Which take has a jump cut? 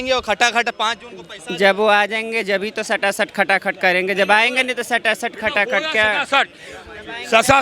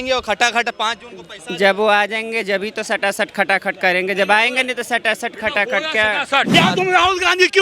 second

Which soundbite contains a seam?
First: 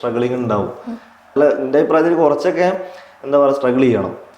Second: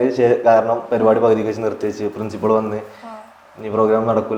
first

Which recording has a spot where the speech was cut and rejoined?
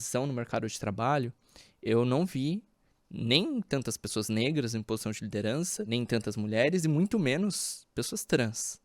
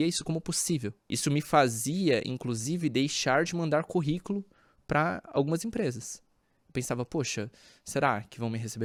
first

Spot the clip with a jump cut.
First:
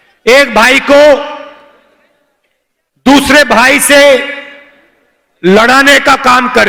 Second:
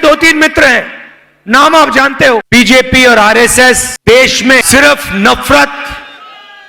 second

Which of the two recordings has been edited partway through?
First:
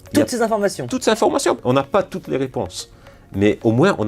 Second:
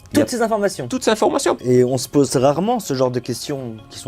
first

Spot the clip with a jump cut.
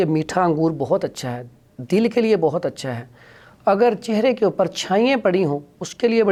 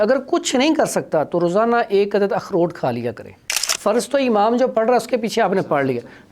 second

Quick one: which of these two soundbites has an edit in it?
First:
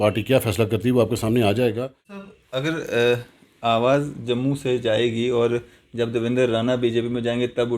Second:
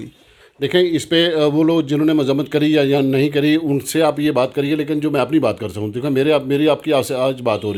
first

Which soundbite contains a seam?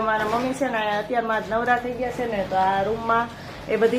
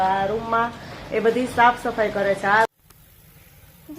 second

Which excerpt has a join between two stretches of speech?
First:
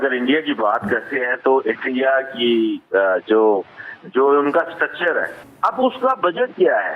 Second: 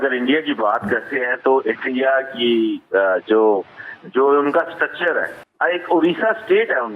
first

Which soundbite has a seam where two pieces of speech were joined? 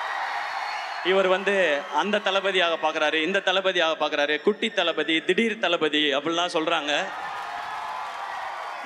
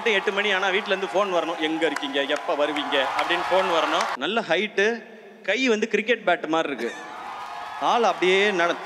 second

